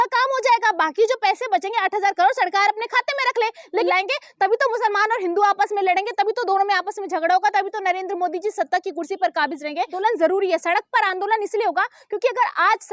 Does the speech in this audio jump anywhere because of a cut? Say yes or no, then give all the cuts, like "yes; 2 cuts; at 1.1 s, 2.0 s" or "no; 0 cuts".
yes; 2 cuts; at 3.9 s, 9.9 s